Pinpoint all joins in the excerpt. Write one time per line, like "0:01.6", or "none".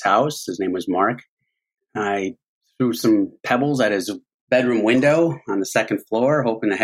0:01.8